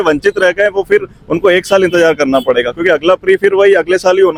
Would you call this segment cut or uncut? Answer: uncut